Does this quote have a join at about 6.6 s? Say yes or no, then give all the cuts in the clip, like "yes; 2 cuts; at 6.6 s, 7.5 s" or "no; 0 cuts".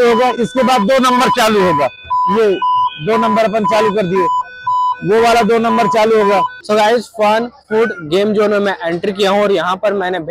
yes; 1 cut; at 6.6 s